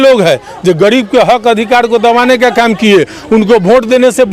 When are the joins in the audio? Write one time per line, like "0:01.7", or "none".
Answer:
none